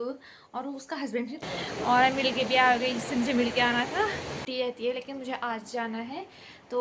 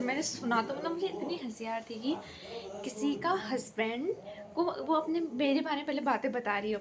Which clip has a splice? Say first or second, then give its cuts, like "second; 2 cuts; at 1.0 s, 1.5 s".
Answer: first; 2 cuts; at 1.4 s, 4.3 s